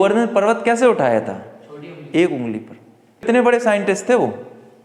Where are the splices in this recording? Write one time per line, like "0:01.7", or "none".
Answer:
0:03.2

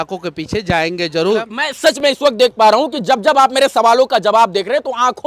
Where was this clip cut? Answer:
0:01.5

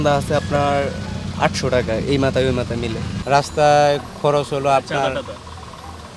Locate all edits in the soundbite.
none

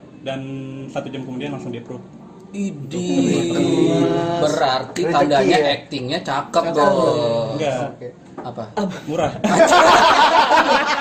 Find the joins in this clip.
none

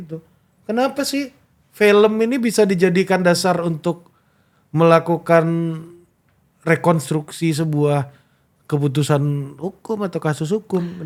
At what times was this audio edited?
none

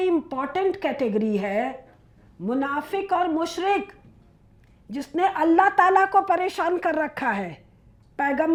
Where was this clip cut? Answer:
none

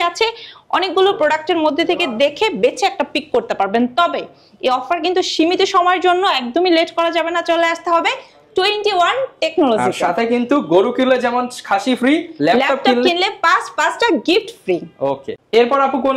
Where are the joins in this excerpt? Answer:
none

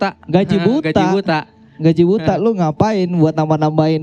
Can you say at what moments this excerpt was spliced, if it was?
none

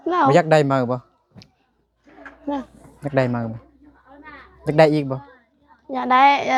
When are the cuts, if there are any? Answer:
none

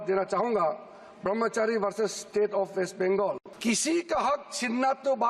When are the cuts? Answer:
0:03.5

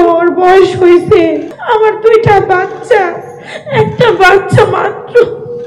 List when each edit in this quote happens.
0:01.5

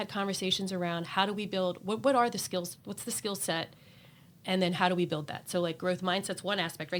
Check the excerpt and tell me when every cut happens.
none

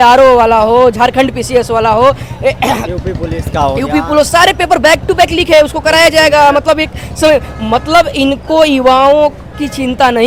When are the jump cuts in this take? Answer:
none

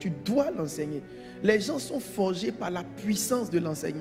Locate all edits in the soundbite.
none

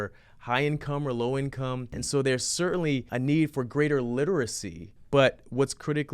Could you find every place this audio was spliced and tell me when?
0:02.0
0:03.1
0:04.9

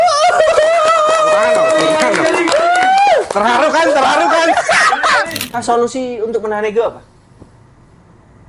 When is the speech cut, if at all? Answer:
0:05.4

